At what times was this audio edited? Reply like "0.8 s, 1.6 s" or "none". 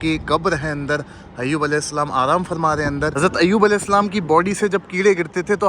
3.2 s